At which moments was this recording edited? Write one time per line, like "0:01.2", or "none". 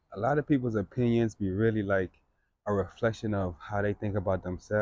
none